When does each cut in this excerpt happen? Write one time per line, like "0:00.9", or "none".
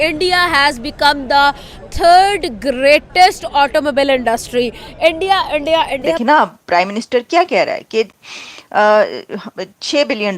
0:06.2